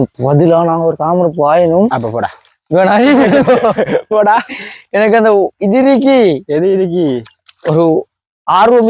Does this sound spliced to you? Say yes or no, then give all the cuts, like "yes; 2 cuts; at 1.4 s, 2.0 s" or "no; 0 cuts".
no; 0 cuts